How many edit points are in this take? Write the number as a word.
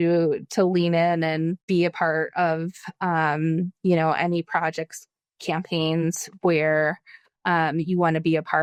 zero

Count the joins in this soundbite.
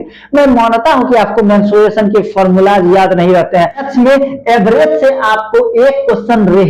one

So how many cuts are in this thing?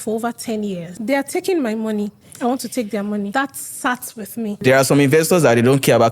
four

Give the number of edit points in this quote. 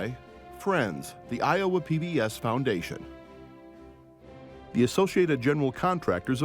two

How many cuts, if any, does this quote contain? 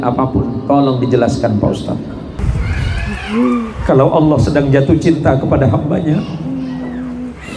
one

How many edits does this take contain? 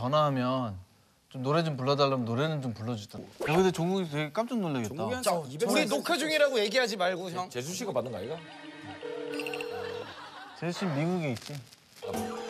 two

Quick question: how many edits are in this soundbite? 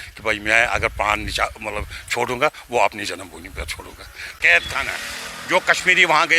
one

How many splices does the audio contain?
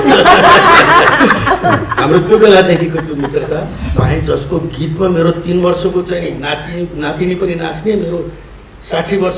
one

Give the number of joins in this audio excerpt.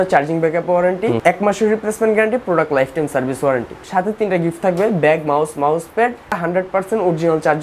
three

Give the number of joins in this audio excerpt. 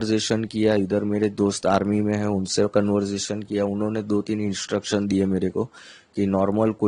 zero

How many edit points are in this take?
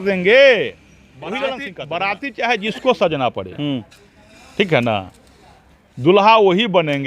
one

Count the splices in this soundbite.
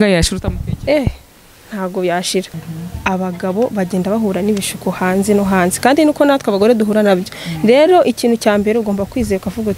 one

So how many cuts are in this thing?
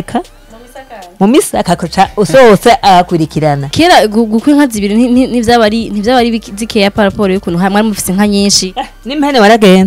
one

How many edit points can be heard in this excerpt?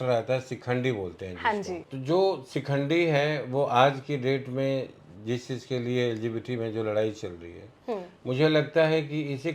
one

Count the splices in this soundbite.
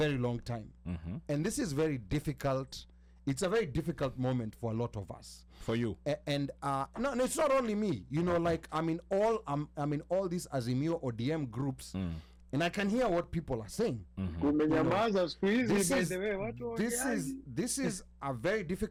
zero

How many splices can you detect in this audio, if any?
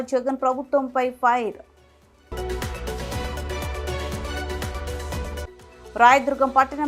zero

